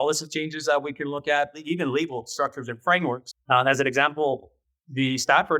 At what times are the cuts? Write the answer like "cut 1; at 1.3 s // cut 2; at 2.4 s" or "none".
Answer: cut 1; at 1.6 s // cut 2; at 3.3 s

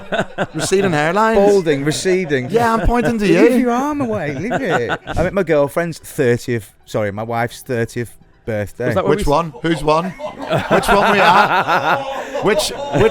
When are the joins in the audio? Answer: cut 1; at 5.1 s

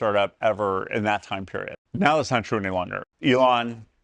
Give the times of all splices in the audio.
cut 1; at 1.8 s // cut 2; at 3.0 s

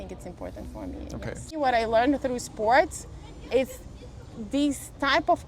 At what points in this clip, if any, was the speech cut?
cut 1; at 1.6 s

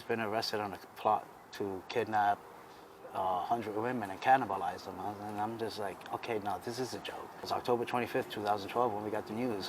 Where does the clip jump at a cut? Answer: cut 1; at 7.4 s

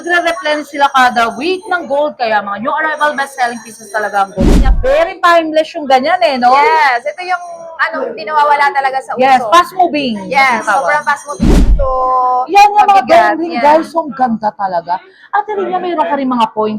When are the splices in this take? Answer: cut 1; at 4.7 s // cut 2; at 11.7 s

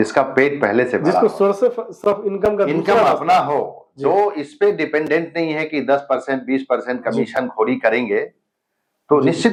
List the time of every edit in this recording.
none

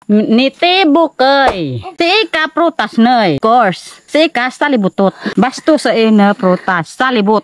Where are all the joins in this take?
cut 1; at 1.5 s // cut 2; at 3.4 s // cut 3; at 5.2 s

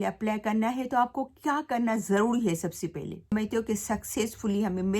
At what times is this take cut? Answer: cut 1; at 3.3 s

